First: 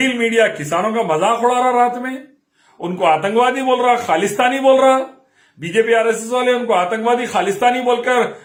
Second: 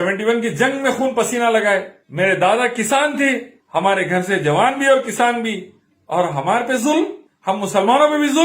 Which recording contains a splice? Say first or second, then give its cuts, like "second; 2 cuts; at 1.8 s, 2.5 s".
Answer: second; 3 cuts; at 2.0 s, 3.5 s, 7.3 s